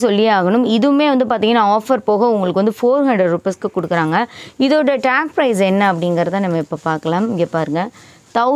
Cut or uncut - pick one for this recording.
uncut